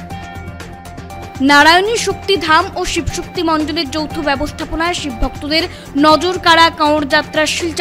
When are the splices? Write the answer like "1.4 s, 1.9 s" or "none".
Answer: 1.3 s